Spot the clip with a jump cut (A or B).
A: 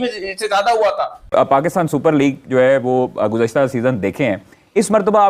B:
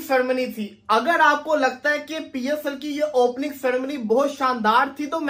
A